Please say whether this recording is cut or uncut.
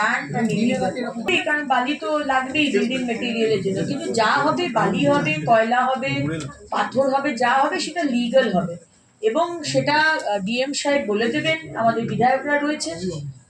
cut